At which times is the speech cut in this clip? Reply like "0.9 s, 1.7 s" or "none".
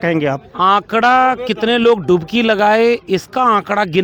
none